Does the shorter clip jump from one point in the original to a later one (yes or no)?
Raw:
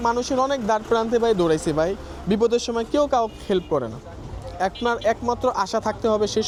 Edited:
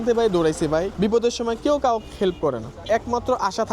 yes